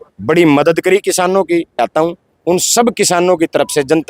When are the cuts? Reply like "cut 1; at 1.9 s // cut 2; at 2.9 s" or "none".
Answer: cut 1; at 1.8 s